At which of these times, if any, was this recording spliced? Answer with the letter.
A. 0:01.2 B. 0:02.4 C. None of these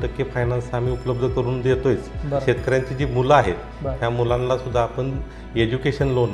B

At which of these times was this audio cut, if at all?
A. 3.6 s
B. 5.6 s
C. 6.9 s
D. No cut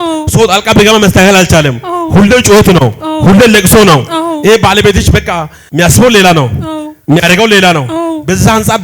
B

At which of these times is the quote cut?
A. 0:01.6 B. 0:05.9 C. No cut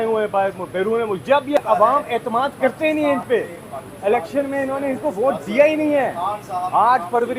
A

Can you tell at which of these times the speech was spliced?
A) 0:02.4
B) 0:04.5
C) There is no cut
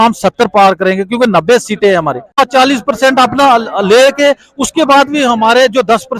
A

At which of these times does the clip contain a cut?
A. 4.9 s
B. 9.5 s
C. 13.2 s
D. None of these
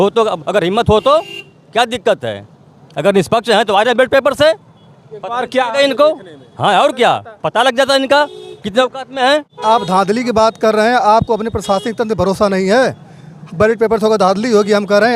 B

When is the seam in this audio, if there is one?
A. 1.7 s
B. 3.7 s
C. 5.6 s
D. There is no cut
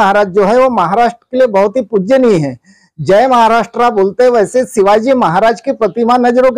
D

